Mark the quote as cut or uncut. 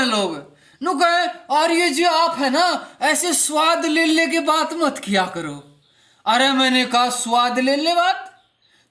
uncut